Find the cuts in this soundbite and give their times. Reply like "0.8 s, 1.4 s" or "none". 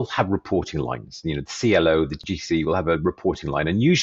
2.3 s